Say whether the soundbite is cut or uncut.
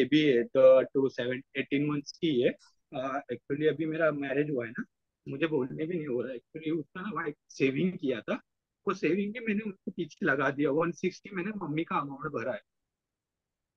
uncut